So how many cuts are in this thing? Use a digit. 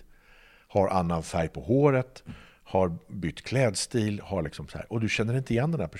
0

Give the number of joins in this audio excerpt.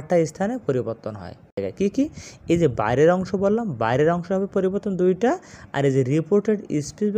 1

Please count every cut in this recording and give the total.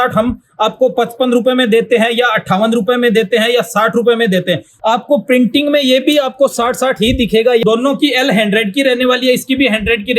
2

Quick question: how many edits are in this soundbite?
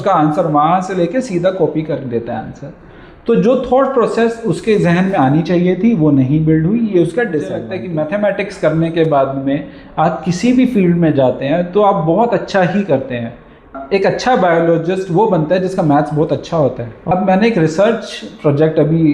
3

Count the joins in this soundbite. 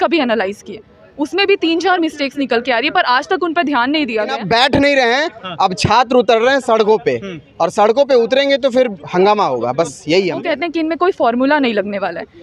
2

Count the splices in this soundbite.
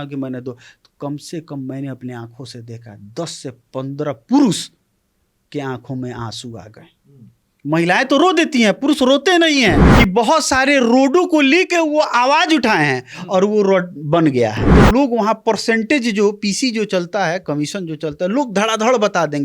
2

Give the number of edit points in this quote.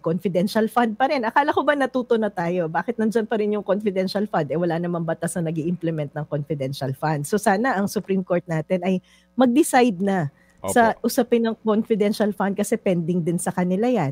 0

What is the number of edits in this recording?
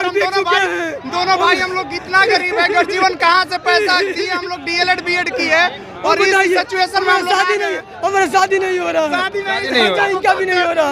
0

